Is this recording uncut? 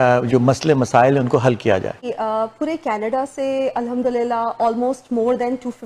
no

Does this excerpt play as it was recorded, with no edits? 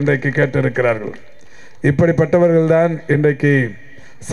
yes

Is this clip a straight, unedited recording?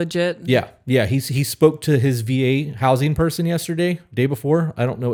yes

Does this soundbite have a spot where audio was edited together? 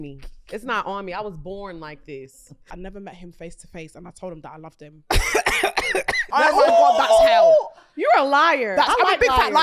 yes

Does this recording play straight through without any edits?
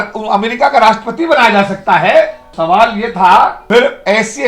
no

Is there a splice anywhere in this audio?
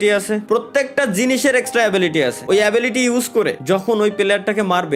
no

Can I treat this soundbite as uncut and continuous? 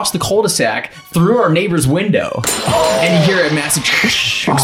yes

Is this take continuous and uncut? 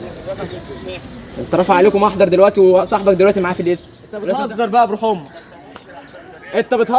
no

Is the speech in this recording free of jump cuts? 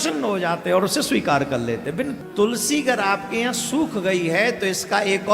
no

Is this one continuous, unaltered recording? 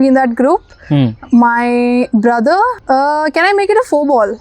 no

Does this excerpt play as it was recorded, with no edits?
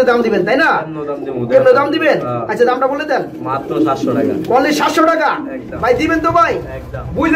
yes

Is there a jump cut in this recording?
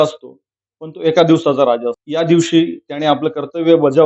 yes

